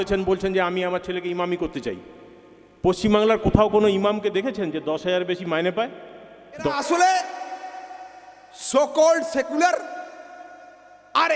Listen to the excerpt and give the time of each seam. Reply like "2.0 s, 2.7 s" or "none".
6.7 s

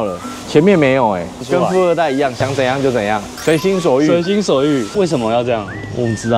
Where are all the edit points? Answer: 1.3 s, 4.9 s

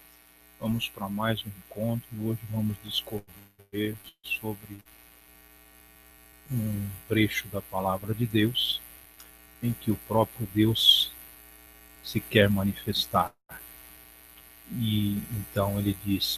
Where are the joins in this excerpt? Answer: none

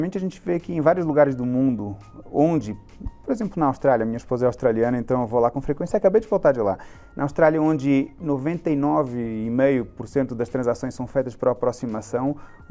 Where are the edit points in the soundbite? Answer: none

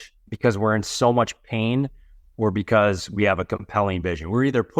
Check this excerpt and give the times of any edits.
none

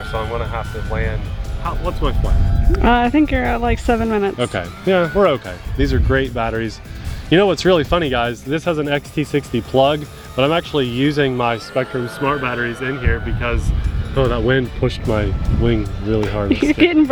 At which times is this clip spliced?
none

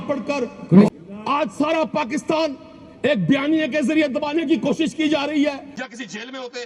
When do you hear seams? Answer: 0.9 s, 5.7 s

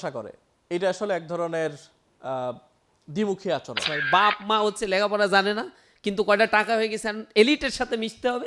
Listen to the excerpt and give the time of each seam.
3.9 s

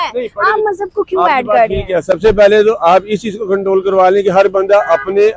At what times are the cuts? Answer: none

